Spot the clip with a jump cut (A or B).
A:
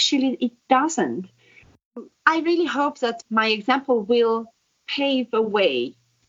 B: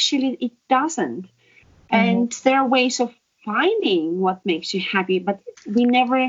A